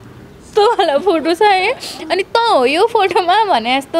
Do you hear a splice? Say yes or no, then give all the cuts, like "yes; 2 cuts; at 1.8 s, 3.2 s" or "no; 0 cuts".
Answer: no; 0 cuts